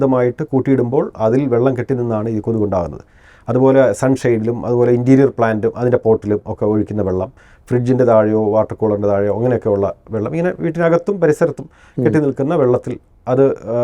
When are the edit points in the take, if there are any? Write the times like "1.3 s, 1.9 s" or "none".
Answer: none